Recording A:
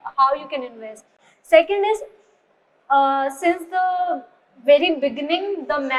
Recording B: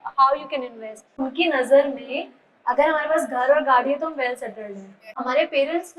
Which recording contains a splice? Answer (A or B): B